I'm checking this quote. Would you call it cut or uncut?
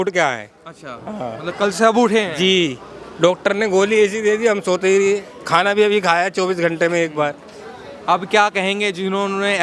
uncut